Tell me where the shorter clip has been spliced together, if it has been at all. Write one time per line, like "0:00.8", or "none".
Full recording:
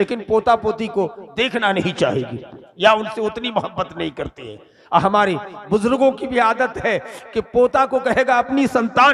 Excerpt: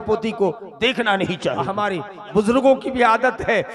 0:01.8